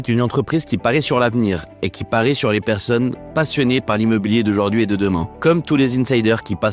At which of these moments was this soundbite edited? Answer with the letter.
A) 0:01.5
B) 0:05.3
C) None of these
B